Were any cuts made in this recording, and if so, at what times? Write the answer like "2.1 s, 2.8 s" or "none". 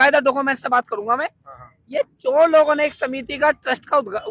none